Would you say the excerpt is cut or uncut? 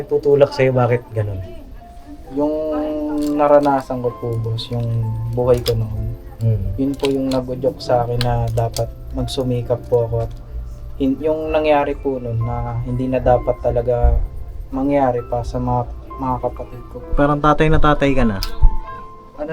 cut